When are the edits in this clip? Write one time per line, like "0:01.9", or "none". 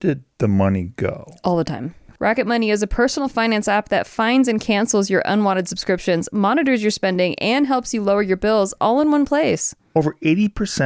0:02.1